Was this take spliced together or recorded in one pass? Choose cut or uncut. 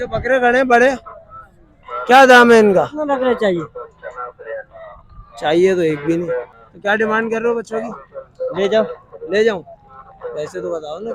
cut